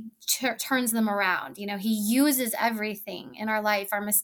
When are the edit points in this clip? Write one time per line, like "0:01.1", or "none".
none